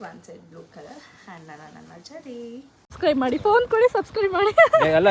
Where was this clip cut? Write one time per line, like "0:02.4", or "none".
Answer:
0:03.0